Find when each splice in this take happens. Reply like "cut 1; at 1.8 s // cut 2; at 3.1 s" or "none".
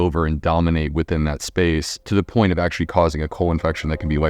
cut 1; at 1.9 s